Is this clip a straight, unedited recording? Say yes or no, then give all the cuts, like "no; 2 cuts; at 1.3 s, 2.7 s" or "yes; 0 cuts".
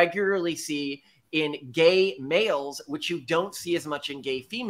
yes; 0 cuts